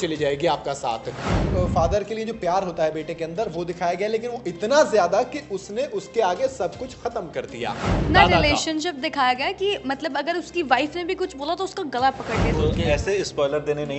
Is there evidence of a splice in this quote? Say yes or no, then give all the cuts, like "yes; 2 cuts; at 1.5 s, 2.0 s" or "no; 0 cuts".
yes; 3 cuts; at 1.5 s, 8.0 s, 12.5 s